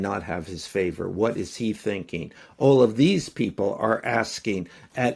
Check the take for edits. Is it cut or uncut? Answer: uncut